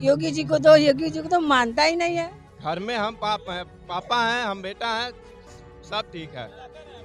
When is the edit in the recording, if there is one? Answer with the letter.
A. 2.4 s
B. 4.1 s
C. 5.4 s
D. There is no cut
A